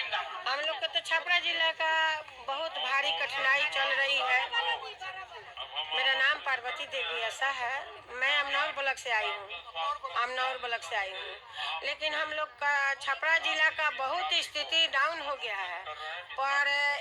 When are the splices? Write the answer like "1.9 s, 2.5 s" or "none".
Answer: none